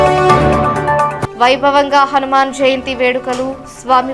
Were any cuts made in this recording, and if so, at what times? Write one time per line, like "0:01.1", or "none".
0:01.1